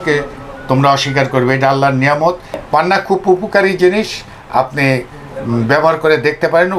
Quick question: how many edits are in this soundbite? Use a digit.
1